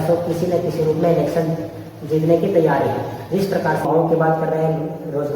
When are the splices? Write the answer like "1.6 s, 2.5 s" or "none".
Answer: 3.9 s

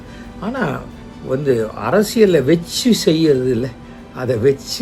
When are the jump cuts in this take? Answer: none

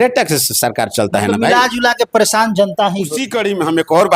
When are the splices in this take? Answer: 3.2 s

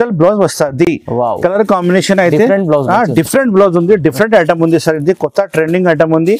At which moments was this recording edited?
none

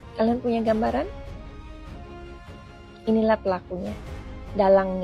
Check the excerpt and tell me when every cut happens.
none

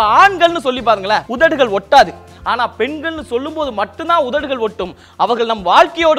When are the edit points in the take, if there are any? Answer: 1.3 s, 2.2 s

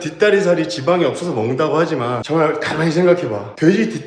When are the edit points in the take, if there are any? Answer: 2.2 s

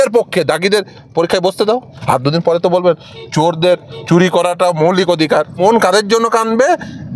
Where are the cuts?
1.9 s, 5.6 s

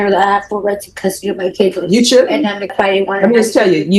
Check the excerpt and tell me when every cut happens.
2.7 s

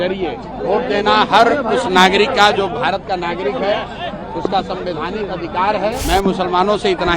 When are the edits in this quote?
6.0 s

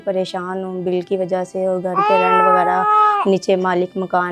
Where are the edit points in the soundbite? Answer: none

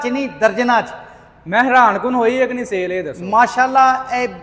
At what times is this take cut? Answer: none

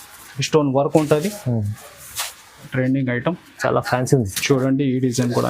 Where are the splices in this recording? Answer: 2.6 s

